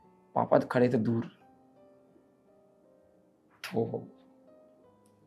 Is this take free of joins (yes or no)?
yes